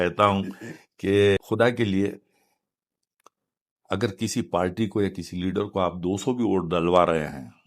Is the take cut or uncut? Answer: cut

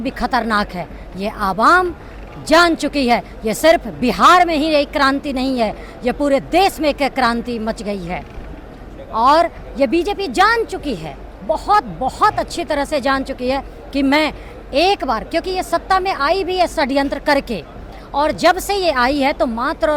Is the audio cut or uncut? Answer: uncut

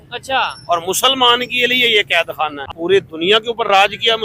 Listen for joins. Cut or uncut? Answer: cut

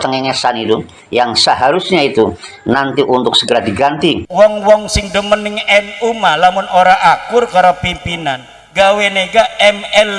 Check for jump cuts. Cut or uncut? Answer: cut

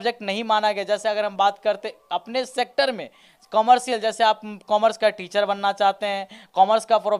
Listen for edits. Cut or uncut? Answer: uncut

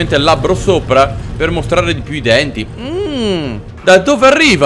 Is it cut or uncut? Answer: cut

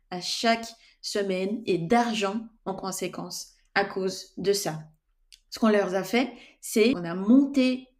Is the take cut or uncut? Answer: cut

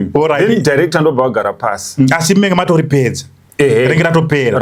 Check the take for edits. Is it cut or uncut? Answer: uncut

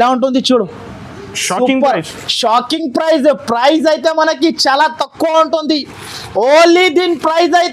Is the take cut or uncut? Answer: uncut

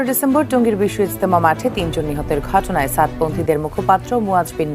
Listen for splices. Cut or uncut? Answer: uncut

